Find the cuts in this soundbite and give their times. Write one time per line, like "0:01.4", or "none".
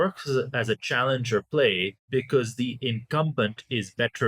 0:01.9